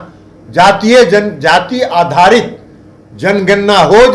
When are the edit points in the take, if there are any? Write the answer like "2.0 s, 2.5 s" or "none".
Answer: none